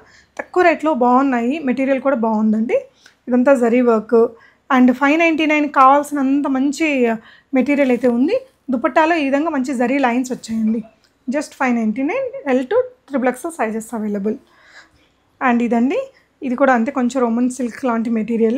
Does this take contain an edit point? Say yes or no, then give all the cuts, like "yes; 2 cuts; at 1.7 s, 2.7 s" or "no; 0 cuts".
no; 0 cuts